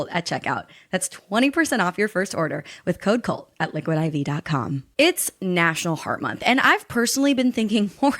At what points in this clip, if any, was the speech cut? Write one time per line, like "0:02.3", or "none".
0:04.8